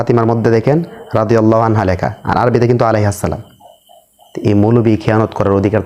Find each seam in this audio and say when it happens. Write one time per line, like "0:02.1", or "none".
none